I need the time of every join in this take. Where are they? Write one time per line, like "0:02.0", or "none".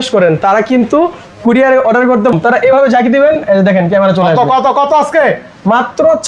0:02.3